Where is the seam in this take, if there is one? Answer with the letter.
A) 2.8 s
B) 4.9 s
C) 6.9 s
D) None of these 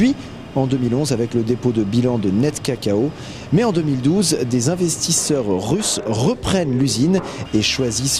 A